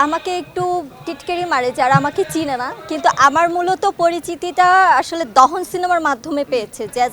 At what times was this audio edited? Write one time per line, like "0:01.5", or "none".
none